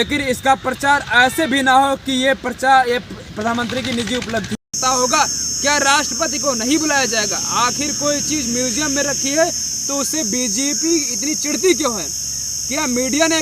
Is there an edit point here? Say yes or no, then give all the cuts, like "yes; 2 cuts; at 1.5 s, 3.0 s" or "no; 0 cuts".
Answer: yes; 1 cut; at 4.6 s